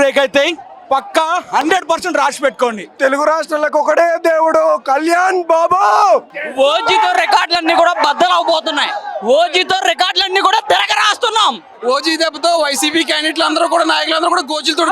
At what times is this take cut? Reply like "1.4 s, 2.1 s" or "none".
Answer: 3.0 s, 6.3 s, 11.7 s